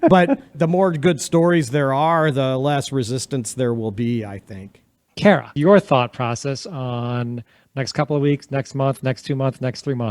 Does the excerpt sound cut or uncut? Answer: uncut